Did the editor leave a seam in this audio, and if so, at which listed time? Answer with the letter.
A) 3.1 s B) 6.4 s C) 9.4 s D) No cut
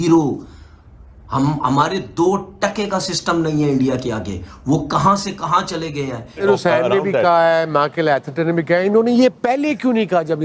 B